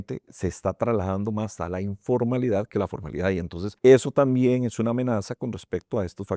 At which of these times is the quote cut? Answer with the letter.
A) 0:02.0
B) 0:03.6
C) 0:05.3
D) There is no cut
B